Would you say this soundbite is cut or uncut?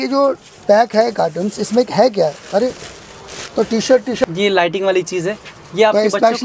cut